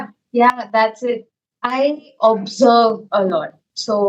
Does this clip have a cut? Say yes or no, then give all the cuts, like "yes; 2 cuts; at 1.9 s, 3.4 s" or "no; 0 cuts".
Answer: yes; 1 cut; at 1.3 s